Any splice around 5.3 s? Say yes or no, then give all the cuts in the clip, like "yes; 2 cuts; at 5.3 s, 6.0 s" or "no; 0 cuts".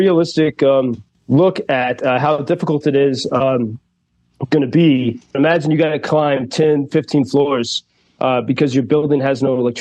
yes; 2 cuts; at 1.1 s, 5.3 s